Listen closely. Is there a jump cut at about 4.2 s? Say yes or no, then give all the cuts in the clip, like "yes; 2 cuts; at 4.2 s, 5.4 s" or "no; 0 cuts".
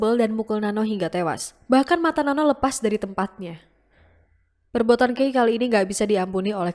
yes; 1 cut; at 4.2 s